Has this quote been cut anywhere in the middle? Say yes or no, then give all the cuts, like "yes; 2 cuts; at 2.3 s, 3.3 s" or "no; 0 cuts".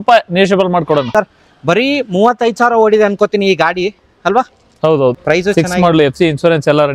yes; 2 cuts; at 1.1 s, 5.2 s